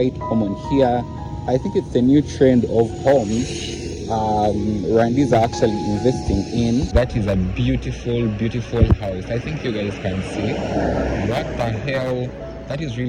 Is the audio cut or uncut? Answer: cut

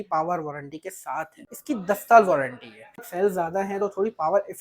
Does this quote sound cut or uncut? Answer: cut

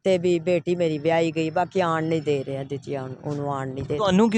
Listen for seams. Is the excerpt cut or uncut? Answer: uncut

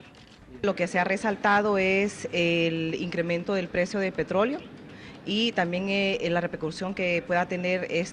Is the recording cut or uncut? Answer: cut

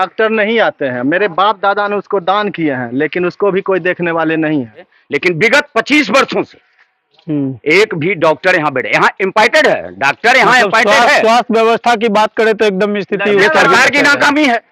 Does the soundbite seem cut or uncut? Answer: cut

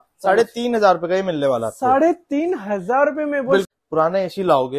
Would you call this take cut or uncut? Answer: cut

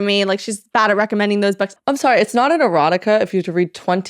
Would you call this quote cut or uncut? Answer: cut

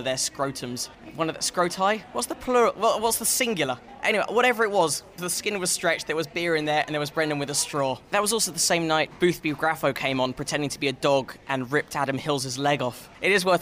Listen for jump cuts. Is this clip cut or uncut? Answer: uncut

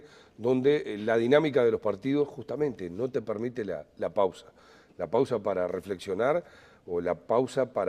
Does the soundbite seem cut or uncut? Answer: cut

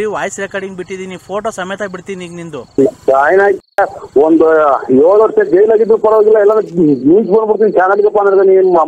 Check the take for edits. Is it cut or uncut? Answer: cut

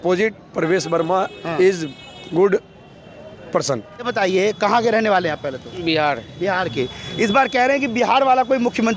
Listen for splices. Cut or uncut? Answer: cut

